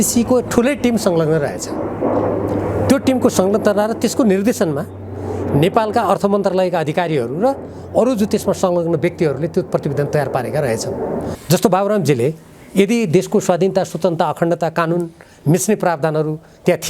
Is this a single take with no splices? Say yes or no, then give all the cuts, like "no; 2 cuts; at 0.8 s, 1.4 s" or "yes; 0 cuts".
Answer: no; 1 cut; at 11.3 s